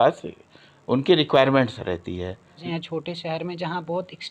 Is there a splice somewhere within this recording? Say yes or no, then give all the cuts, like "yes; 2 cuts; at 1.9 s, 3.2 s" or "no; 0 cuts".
yes; 1 cut; at 2.6 s